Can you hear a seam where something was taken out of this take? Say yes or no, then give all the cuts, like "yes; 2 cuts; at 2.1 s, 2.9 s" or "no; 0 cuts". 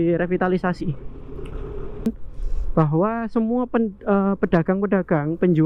yes; 1 cut; at 2.1 s